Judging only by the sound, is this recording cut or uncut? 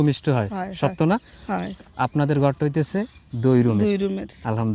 cut